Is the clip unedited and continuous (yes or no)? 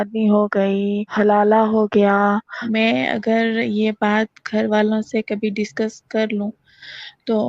no